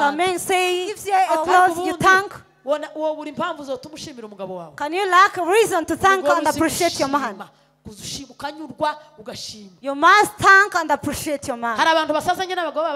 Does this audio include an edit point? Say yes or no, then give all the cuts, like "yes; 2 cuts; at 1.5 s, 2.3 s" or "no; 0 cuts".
yes; 1 cut; at 0.9 s